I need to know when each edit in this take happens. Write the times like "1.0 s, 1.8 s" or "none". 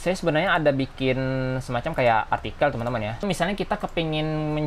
3.2 s

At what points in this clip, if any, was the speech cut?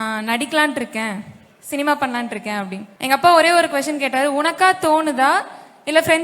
2.8 s

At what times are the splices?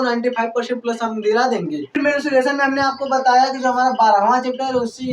2.0 s

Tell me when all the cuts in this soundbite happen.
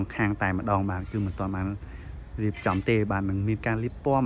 none

